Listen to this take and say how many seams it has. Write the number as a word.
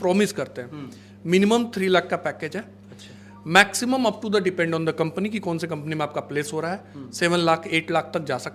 zero